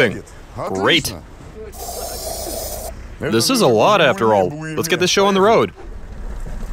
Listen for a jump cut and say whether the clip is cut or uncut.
uncut